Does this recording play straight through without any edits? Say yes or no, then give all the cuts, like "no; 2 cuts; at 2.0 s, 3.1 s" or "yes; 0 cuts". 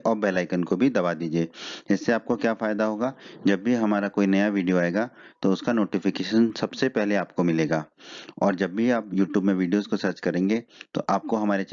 yes; 0 cuts